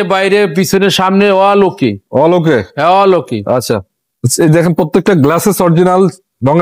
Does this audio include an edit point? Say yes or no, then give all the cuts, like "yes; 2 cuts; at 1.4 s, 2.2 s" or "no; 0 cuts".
no; 0 cuts